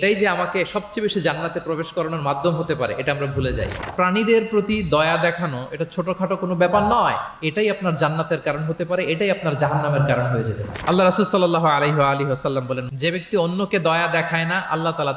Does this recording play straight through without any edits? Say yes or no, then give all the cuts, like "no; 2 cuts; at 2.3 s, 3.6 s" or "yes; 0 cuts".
no; 2 cuts; at 3.9 s, 12.9 s